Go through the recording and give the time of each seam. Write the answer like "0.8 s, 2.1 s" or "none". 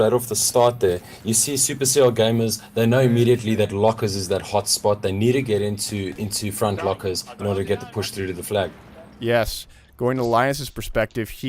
6.2 s